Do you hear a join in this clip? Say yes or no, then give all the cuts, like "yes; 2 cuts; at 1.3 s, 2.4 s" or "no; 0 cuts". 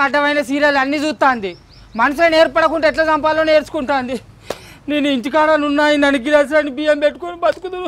no; 0 cuts